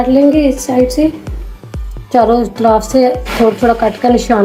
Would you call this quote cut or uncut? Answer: uncut